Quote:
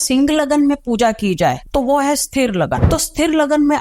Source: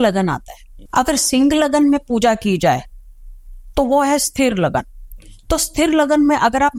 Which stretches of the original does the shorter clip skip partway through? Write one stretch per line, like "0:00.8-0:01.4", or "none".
0:02.9-0:03.7
0:04.8-0:05.4